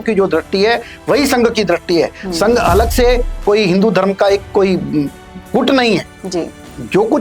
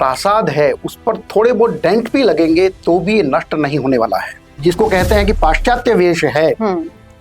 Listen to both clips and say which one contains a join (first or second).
second